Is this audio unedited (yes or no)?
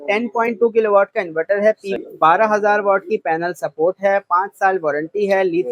no